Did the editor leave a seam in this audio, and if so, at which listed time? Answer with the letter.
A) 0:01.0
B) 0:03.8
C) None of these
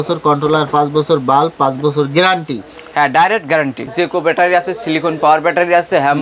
B